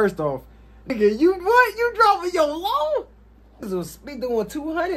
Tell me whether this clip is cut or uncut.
cut